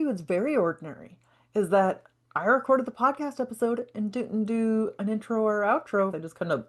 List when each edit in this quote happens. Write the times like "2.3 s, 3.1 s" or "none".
none